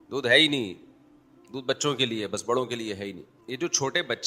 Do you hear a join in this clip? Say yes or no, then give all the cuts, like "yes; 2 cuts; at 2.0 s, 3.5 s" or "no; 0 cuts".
yes; 1 cut; at 3.3 s